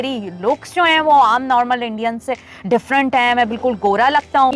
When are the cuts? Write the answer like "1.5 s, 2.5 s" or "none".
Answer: none

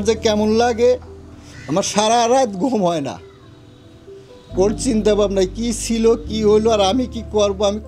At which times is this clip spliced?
none

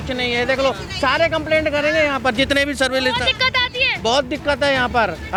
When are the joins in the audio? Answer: none

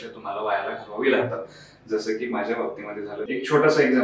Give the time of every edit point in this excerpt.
3.1 s

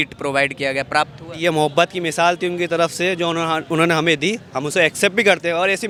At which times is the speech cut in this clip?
none

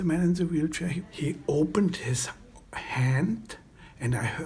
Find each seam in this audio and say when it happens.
1.0 s

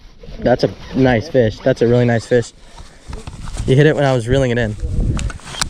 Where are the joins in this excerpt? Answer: none

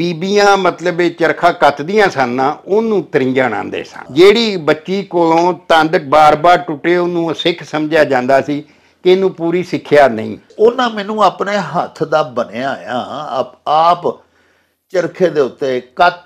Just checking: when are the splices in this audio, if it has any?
4.0 s, 10.4 s

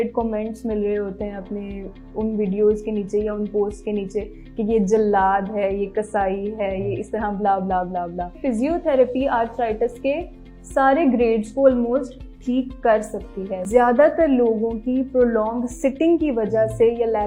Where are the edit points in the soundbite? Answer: 8.4 s, 13.6 s

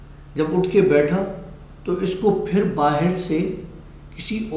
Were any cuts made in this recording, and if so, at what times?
none

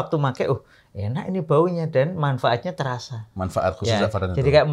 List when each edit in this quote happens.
none

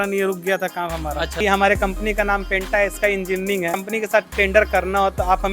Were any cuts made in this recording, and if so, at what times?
1.4 s, 3.8 s

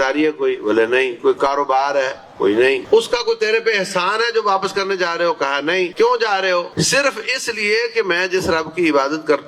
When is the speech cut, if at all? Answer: 2.8 s, 5.9 s, 6.7 s

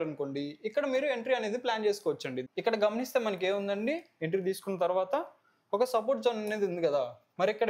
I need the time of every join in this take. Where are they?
2.4 s

